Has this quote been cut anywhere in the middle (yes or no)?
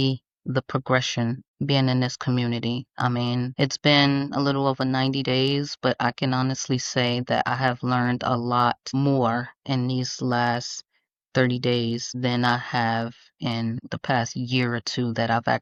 no